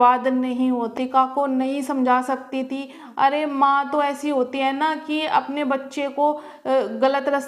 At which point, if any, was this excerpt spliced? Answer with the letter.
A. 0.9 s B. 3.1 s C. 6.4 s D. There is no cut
A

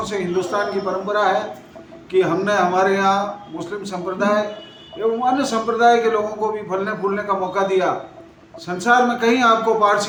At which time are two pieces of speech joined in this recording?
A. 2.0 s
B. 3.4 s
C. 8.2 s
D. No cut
D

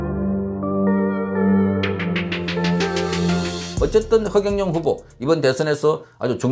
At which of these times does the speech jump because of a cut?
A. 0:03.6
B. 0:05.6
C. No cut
A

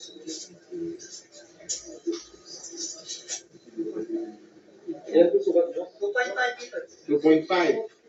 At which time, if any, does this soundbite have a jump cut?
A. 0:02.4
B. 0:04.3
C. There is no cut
C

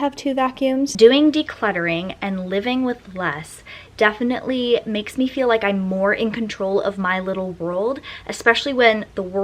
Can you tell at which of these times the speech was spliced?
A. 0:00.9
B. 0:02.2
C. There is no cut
A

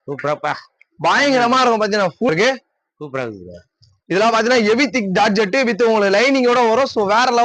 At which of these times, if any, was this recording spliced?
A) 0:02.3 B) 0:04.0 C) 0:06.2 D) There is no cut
A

